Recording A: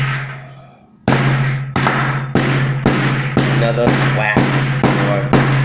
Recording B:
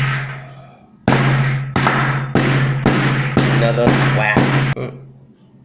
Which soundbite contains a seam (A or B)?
B